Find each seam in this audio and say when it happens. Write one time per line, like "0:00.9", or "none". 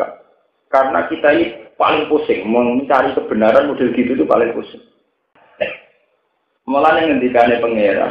0:05.4